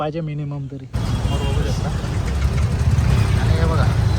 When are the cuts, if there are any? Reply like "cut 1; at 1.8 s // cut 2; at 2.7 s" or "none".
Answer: cut 1; at 0.9 s